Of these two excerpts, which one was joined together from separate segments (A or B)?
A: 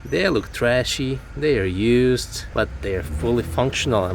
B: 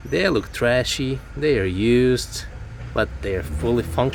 A